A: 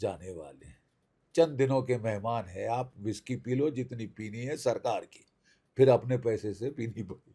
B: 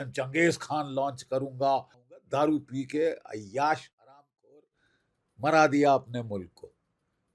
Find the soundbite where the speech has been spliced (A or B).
B